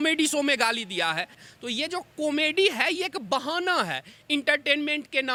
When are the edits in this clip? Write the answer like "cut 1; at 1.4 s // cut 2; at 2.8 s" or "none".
none